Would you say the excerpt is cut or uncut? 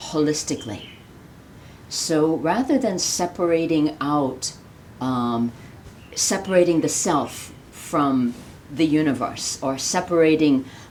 uncut